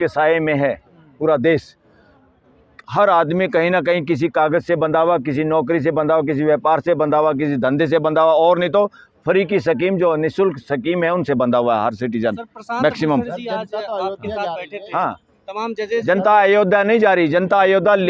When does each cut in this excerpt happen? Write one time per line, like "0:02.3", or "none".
none

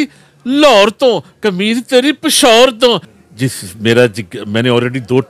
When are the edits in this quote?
0:03.1

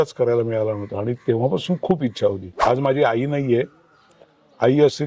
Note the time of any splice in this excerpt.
0:02.5

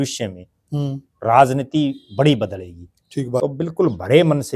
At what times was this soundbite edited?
0:03.4

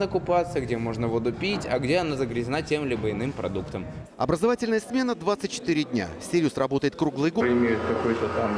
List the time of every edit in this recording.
none

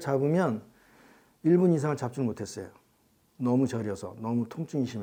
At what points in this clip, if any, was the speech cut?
none

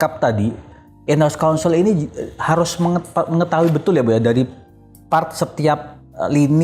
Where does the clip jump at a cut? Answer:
none

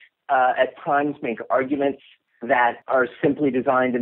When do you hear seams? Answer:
0:02.8

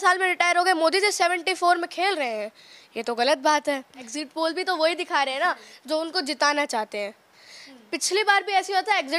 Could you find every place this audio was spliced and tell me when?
0:04.2

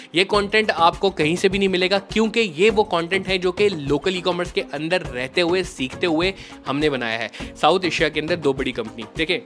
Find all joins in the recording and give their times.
0:07.4

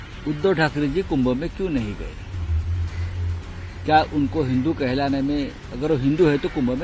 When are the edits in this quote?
none

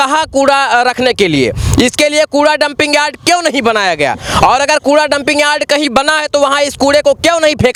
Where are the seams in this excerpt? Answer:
none

